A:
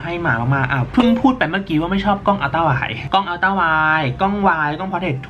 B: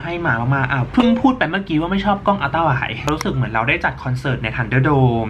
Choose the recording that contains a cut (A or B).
B